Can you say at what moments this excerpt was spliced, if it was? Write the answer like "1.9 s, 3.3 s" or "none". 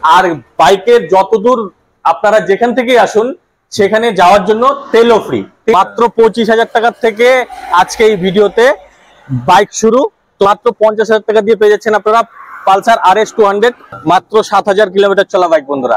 5.7 s, 10.4 s, 13.9 s

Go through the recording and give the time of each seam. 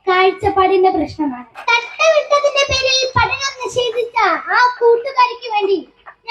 1.5 s

